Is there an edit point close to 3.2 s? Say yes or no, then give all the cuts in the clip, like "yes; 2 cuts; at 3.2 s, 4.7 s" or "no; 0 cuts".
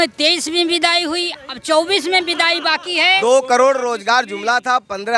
yes; 1 cut; at 3.2 s